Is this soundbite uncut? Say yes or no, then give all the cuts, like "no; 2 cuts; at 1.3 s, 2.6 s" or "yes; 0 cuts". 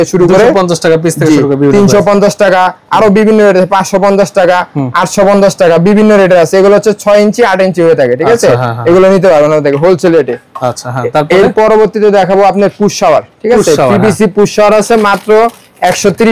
yes; 0 cuts